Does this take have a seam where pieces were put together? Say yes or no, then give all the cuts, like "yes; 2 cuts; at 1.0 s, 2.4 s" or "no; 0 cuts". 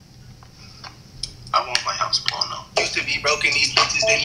yes; 1 cut; at 2.6 s